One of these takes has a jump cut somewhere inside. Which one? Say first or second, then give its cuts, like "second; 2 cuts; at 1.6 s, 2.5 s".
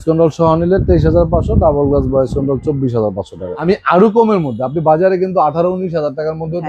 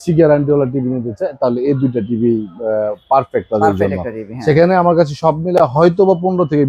first; 1 cut; at 3.5 s